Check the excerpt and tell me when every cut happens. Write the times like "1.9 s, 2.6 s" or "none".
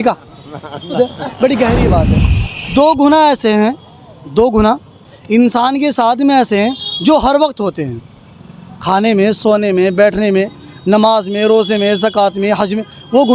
1.0 s